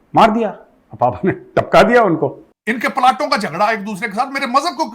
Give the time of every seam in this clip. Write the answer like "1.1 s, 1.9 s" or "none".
2.4 s